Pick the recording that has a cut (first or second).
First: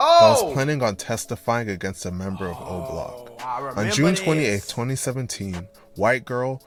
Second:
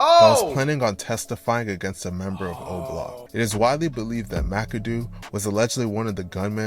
second